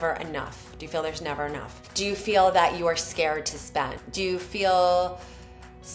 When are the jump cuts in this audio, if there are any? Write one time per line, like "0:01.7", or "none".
0:01.8
0:04.0

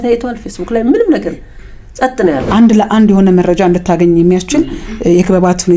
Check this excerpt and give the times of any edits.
0:02.5

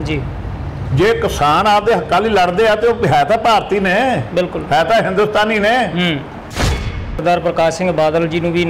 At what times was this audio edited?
0:06.7

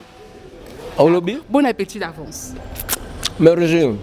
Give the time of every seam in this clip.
0:01.4

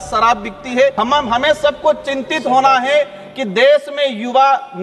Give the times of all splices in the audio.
0:00.9

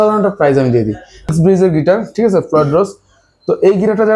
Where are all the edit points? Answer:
0:01.3

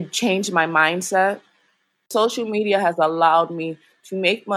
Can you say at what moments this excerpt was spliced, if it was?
0:02.0

